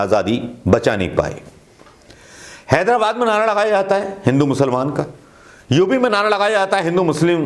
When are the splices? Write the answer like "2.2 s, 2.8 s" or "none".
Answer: none